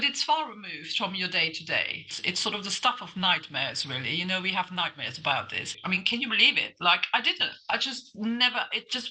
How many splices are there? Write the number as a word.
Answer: two